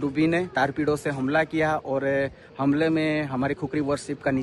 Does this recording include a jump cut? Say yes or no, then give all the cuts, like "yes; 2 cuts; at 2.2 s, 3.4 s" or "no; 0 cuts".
no; 0 cuts